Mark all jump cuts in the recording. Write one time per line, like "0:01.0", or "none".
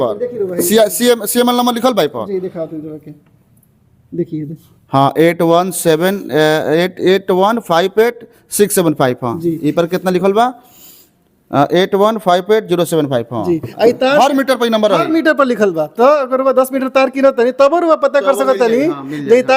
none